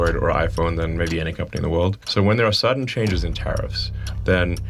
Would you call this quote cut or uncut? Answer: cut